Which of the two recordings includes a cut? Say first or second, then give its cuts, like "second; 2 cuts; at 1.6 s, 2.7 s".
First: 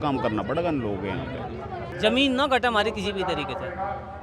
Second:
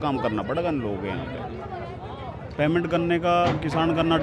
first; 1 cut; at 1.9 s